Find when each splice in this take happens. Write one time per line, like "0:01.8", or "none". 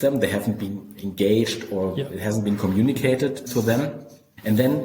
0:03.7